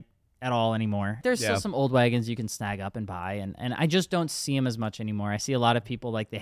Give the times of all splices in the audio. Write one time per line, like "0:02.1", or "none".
0:01.2